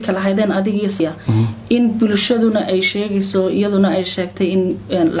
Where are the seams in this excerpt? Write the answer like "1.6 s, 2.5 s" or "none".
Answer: 1.0 s